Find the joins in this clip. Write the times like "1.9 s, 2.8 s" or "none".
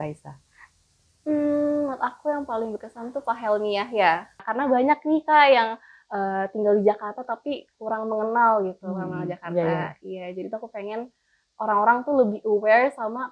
4.4 s